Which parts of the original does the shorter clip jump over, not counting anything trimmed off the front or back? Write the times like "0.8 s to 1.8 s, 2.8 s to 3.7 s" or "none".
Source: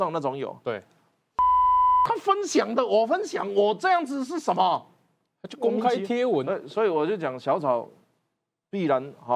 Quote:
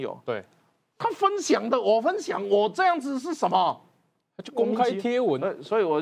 1.4 s to 2.1 s